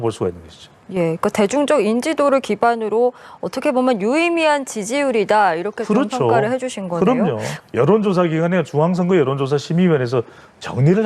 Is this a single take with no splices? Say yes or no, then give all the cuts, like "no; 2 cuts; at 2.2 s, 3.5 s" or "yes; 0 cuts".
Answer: no; 1 cut; at 7.5 s